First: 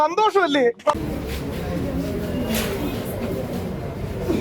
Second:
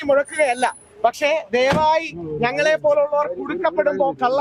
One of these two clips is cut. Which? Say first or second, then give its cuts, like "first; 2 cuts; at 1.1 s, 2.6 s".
first; 1 cut; at 0.9 s